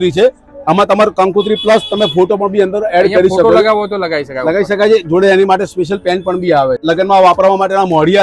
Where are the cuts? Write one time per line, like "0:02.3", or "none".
0:06.8